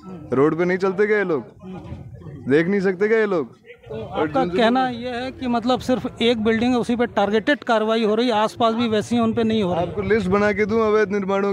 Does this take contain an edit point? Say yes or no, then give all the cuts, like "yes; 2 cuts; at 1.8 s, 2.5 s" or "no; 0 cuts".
no; 0 cuts